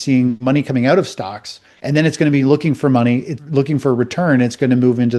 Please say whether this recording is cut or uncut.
cut